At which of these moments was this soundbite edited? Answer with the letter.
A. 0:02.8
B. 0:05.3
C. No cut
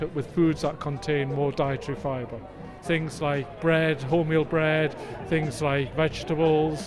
A